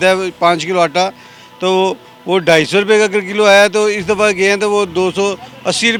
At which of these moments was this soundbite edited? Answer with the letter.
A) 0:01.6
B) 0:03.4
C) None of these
C